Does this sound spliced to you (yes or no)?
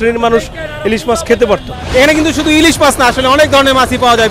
yes